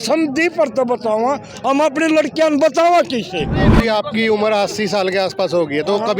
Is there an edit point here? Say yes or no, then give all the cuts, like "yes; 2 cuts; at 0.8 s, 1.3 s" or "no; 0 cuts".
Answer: yes; 1 cut; at 3.6 s